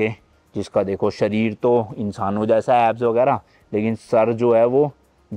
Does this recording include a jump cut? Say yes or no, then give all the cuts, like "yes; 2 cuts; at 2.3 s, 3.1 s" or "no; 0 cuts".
no; 0 cuts